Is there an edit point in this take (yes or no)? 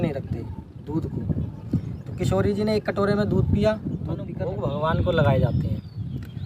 yes